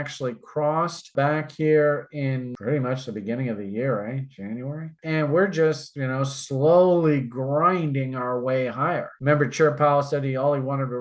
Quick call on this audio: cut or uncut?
cut